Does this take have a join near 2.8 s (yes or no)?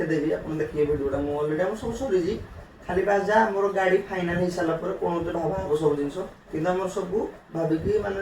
no